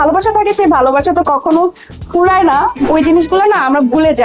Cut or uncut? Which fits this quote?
cut